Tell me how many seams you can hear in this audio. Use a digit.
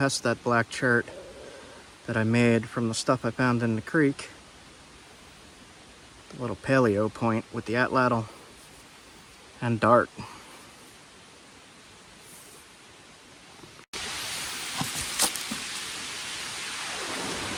0